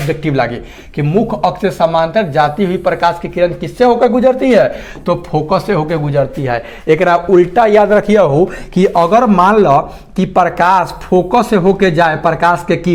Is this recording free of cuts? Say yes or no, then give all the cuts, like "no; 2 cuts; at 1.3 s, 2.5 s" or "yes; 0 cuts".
yes; 0 cuts